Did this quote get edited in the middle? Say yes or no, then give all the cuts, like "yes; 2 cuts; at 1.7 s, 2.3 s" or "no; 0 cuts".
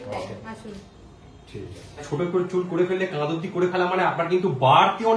yes; 1 cut; at 2.0 s